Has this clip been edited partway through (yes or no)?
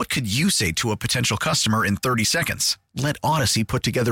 no